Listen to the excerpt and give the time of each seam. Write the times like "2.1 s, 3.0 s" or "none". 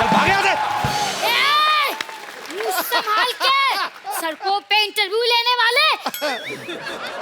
1.2 s, 4.0 s